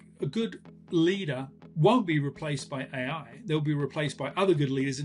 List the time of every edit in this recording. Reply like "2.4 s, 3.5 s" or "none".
1.7 s